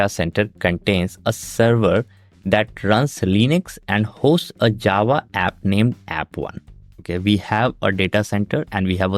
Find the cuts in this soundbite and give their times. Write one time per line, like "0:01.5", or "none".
none